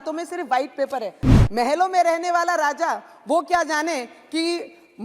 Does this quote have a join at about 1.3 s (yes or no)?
yes